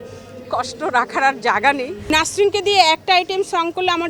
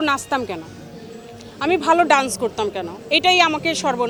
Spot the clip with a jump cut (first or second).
first